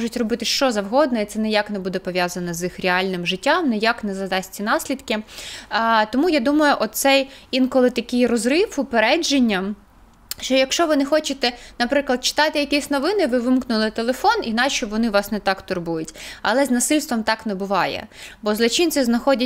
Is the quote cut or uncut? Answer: uncut